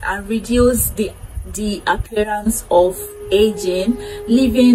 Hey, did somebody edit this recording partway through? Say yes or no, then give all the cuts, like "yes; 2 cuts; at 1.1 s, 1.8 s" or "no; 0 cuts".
no; 0 cuts